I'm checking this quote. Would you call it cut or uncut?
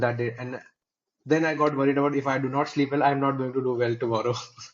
uncut